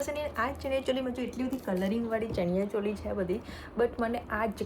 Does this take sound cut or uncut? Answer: uncut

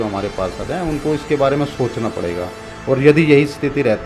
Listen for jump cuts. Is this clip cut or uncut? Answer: uncut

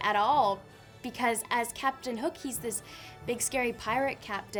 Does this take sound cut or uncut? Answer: uncut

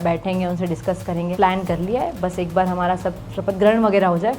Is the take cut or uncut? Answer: cut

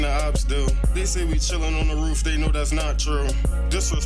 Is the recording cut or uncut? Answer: cut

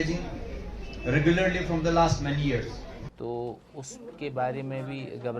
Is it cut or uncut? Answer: cut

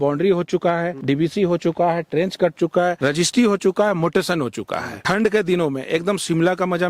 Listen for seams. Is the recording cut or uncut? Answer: cut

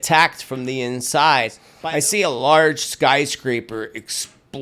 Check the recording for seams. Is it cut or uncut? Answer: cut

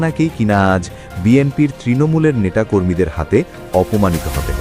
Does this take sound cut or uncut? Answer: uncut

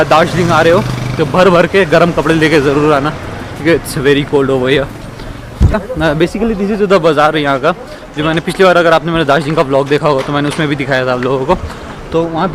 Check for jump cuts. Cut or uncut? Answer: uncut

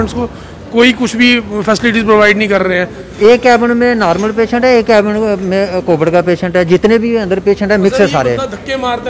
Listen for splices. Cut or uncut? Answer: cut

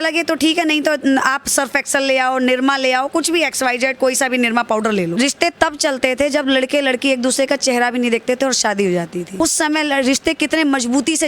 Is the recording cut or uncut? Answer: cut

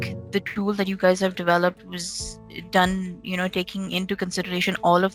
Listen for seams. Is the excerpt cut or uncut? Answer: uncut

